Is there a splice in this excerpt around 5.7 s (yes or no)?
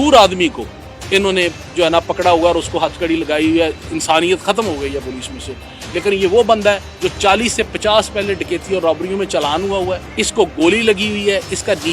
no